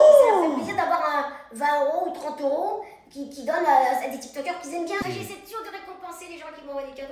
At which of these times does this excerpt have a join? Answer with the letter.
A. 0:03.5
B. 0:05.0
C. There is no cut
B